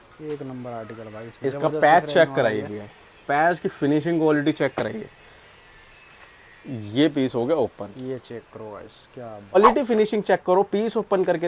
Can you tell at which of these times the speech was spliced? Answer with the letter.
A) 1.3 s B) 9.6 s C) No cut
B